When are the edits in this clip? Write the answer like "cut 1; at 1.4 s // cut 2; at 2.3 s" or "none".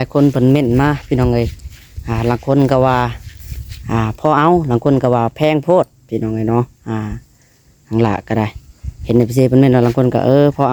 none